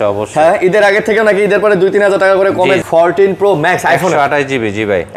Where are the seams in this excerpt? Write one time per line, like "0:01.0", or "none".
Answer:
0:02.8